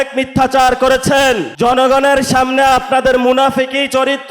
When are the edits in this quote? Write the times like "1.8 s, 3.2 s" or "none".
1.5 s